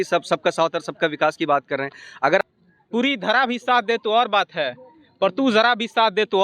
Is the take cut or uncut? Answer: cut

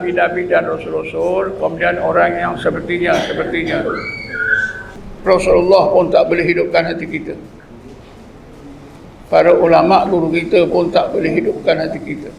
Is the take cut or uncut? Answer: cut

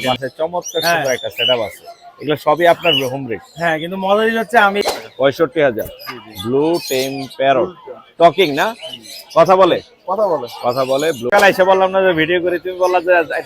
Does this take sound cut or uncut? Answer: cut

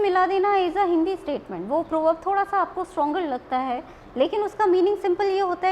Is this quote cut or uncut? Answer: uncut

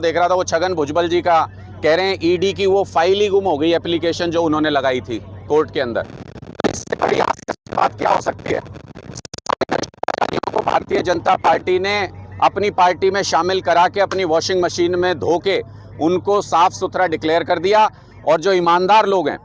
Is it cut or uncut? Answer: uncut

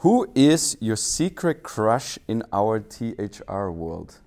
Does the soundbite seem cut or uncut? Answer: uncut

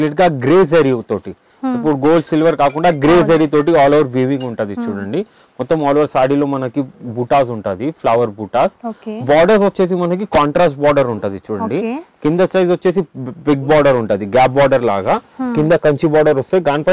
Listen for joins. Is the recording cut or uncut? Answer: uncut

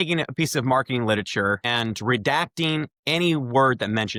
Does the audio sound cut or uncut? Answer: uncut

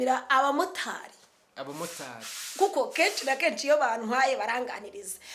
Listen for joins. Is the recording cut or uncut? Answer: uncut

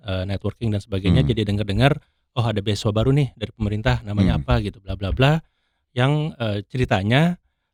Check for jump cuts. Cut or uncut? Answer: uncut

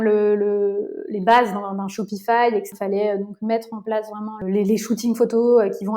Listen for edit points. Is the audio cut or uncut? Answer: cut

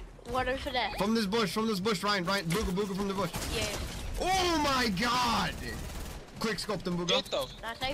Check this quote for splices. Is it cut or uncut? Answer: uncut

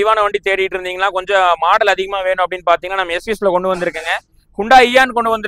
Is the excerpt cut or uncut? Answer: uncut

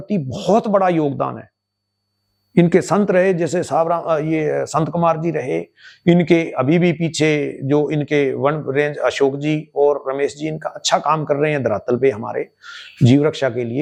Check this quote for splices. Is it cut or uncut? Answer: uncut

